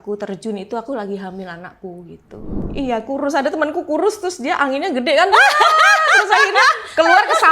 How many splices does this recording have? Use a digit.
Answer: 1